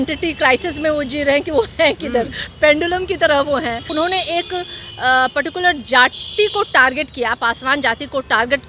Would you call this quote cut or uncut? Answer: cut